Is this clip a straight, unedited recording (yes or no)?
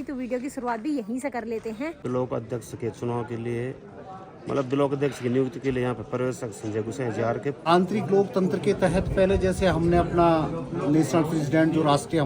no